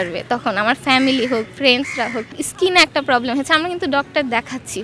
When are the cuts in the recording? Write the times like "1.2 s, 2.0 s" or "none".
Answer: 2.4 s

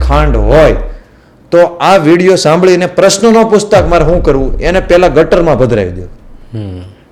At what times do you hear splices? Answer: none

